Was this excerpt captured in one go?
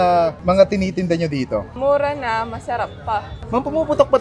no; 1 cut; at 1.7 s

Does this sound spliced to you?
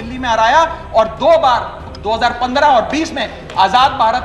no; 0 cuts

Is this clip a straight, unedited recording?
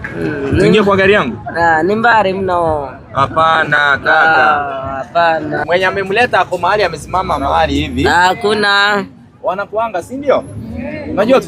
no; 1 cut; at 5.6 s

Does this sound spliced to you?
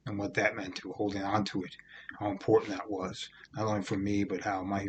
no; 0 cuts

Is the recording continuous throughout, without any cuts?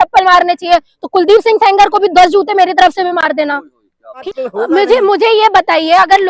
no; 1 cut; at 4.2 s

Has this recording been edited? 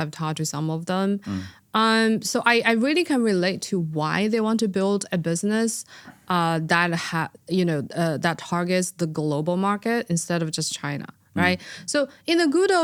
no; 0 cuts

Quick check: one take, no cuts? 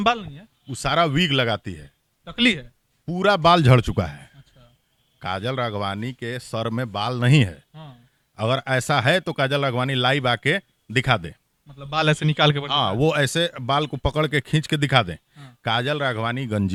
yes; 0 cuts

